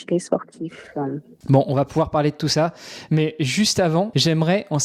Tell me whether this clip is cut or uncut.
uncut